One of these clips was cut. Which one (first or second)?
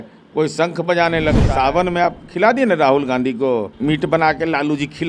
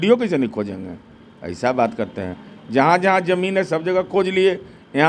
first